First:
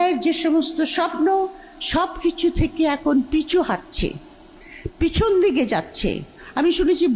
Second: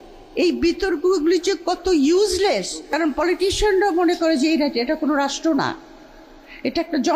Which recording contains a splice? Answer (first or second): second